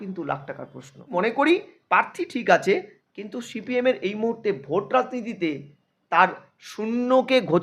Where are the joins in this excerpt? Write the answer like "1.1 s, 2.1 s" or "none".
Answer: 1.1 s